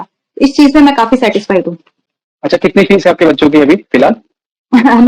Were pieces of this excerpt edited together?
no; 0 cuts

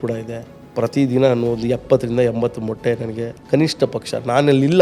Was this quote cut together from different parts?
no; 0 cuts

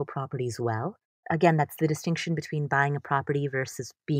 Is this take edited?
yes; 1 cut; at 1.1 s

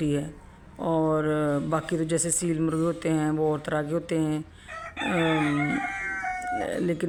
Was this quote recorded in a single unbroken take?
yes; 0 cuts

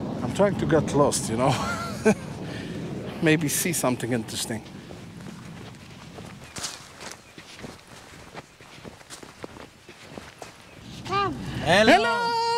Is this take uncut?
no; 2 cuts; at 6.4 s, 11.0 s

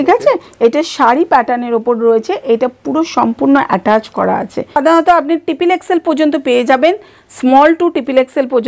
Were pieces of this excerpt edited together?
yes; 1 cut; at 4.8 s

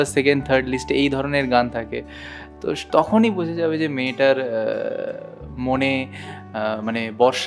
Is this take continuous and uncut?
yes; 0 cuts

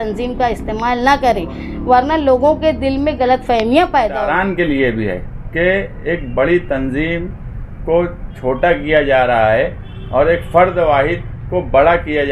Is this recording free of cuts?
no; 1 cut; at 4.3 s

